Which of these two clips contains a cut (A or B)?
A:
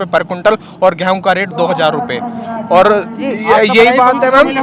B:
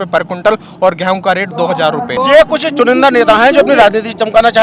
B